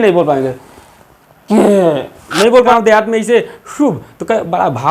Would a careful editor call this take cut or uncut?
cut